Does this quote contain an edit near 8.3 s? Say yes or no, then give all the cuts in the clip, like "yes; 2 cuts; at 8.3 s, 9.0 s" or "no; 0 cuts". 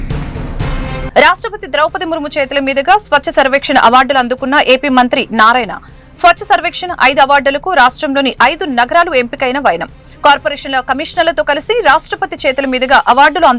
no; 1 cut; at 0.9 s